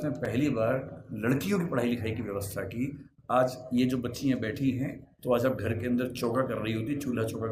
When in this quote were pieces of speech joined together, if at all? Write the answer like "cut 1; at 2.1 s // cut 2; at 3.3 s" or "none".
cut 1; at 5.1 s